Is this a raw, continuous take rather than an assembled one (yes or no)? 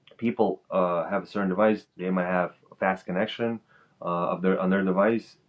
yes